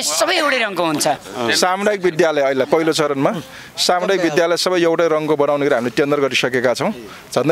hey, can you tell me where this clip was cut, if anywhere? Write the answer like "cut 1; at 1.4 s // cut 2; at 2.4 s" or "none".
none